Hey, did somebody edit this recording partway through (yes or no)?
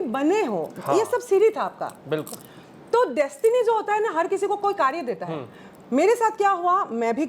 no